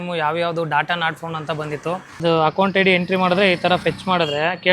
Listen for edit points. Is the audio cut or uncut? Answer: cut